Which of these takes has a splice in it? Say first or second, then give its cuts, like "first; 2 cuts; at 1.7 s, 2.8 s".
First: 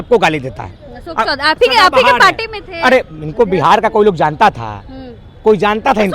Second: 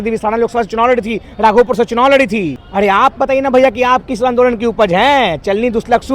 second; 1 cut; at 2.6 s